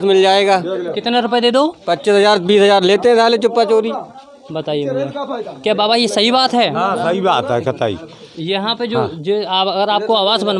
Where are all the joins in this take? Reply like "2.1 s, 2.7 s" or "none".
none